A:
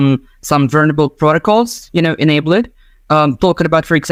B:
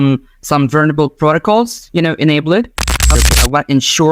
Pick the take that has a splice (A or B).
B